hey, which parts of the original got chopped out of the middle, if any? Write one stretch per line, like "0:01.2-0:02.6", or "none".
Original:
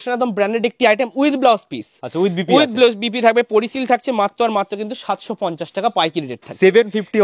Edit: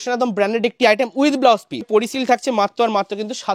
0:01.9-0:03.5